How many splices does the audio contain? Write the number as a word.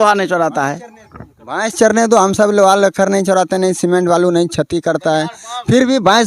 zero